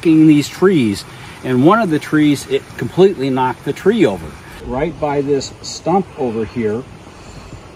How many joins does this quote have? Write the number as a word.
one